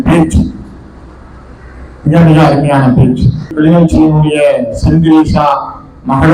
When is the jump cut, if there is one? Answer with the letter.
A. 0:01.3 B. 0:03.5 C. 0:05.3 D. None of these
B